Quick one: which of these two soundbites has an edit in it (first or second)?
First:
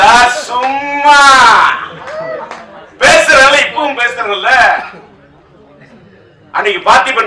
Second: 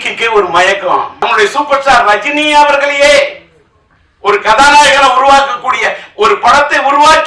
second